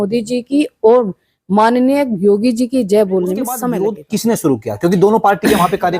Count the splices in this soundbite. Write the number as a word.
one